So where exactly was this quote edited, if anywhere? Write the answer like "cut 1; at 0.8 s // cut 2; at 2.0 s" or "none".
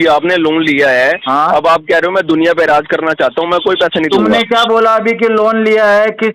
none